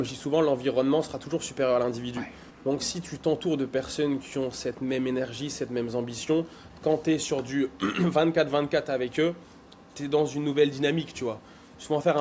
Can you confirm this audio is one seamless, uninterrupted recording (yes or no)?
yes